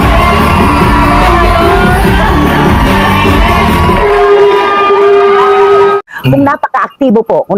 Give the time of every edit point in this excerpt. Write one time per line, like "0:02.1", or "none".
0:06.1